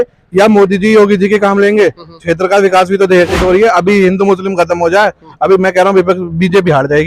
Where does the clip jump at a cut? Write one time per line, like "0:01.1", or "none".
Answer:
0:03.4

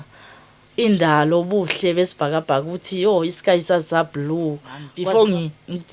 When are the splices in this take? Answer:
0:04.8

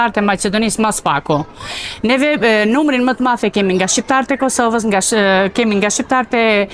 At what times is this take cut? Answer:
none

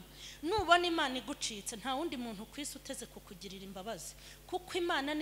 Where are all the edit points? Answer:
none

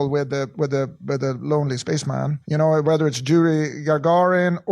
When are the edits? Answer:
0:02.4

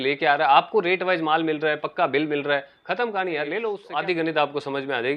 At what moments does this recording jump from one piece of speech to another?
0:03.8

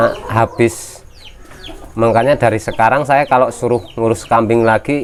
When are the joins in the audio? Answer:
none

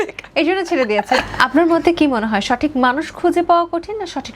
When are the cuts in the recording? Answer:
0:01.2

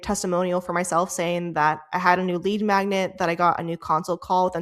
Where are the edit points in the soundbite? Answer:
none

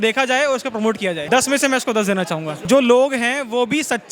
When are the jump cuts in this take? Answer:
0:01.2
0:02.5

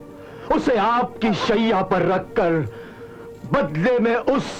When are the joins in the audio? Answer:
none

